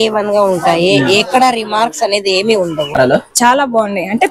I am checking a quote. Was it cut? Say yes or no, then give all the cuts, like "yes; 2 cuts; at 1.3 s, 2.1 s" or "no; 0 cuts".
yes; 1 cut; at 3.0 s